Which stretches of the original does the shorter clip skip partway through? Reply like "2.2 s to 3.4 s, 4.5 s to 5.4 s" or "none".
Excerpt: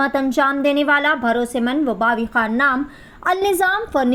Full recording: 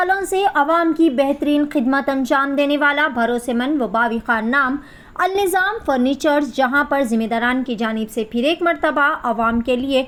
none